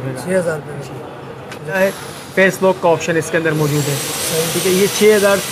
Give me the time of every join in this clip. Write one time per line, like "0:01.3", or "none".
0:01.8